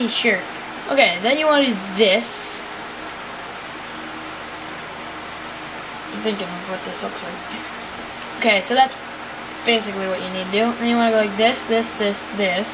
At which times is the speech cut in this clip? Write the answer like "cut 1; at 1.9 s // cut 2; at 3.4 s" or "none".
none